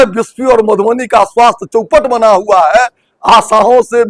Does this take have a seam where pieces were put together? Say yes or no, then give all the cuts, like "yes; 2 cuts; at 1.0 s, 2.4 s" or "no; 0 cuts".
no; 0 cuts